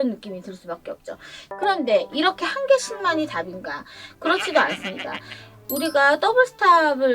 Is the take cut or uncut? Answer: cut